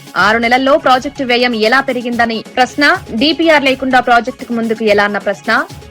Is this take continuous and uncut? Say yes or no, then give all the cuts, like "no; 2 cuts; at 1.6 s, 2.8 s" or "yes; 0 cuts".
yes; 0 cuts